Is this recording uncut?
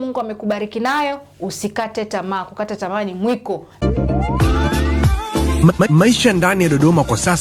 no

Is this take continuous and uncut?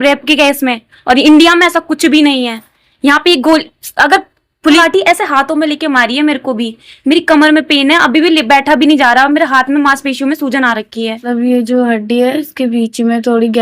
no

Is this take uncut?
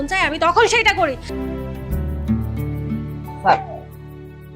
no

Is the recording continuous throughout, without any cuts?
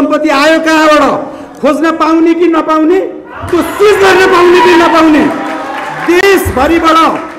yes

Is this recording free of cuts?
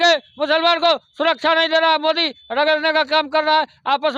yes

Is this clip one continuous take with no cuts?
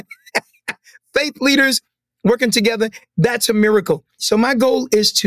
no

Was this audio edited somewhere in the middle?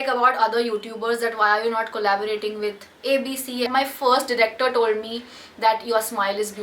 yes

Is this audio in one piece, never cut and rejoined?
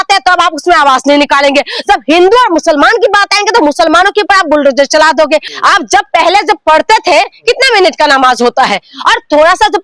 no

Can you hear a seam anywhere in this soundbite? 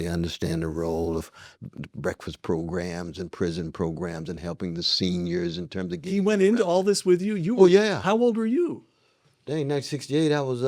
no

